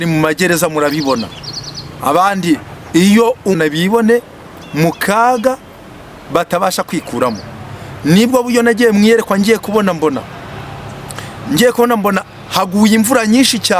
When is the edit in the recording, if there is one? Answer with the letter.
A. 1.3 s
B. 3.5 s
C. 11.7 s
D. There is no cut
B